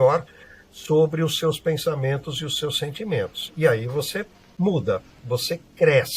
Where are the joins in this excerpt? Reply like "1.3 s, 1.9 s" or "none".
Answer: 5.2 s